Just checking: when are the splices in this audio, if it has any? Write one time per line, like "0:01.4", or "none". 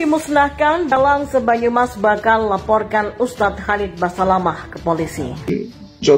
0:00.9
0:05.5